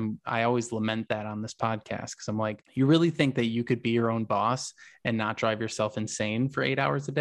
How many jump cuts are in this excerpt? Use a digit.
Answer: 1